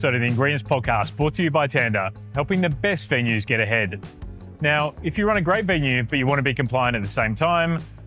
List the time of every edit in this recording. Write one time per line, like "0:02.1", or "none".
none